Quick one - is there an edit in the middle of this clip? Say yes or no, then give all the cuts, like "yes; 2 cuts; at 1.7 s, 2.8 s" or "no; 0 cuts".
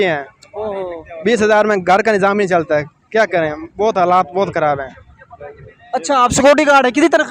no; 0 cuts